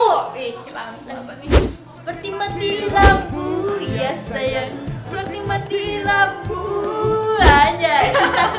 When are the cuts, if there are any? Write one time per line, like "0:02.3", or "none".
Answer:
none